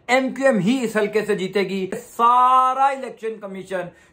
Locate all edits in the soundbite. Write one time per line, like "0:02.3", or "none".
0:02.0